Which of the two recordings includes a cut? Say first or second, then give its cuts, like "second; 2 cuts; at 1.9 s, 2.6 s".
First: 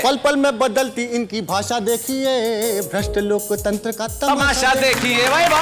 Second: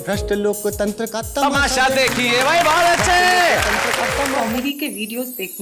second; 1 cut; at 4.4 s